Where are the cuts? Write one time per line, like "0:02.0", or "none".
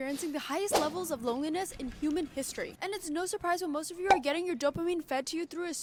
none